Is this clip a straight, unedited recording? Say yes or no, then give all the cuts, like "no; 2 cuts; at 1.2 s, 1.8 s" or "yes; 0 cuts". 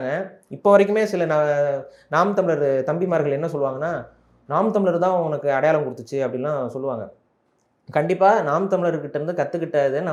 yes; 0 cuts